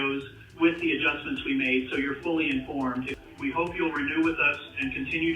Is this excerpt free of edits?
no; 1 cut; at 3.1 s

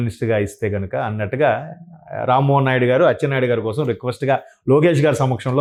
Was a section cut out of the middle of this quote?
no; 0 cuts

